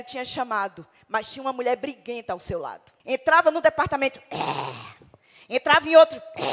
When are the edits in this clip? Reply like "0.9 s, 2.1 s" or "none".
2.9 s